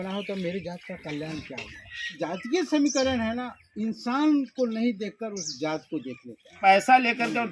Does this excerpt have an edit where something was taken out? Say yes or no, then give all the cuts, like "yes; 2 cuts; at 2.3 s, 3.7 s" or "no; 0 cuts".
yes; 2 cuts; at 2.1 s, 6.5 s